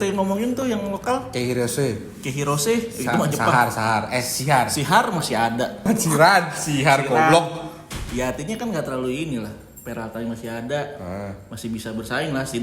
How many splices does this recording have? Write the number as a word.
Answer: one